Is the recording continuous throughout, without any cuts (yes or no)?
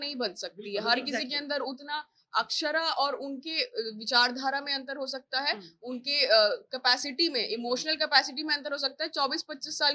yes